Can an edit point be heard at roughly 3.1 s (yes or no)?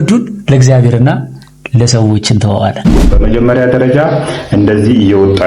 yes